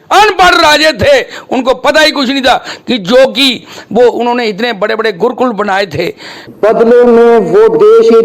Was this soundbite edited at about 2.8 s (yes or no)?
no